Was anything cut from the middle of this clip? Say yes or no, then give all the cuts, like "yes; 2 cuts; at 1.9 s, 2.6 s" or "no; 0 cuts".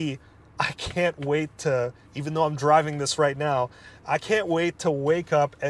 no; 0 cuts